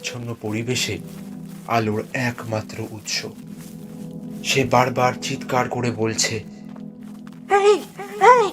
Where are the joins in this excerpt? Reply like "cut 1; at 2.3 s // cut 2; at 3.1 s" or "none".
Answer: cut 1; at 3.3 s // cut 2; at 4.4 s